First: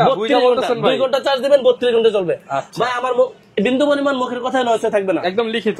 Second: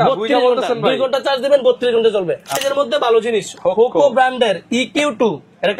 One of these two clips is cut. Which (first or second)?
second